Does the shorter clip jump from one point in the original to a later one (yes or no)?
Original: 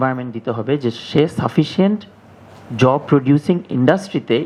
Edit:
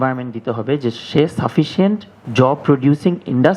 yes